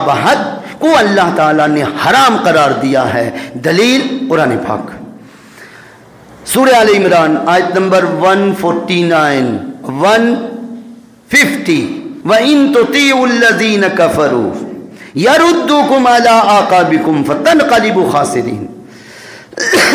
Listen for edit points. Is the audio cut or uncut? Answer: cut